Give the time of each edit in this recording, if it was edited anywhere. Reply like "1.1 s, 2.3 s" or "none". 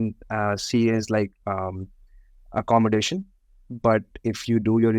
3.6 s